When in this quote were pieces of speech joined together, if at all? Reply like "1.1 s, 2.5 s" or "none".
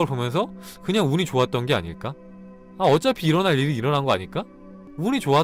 none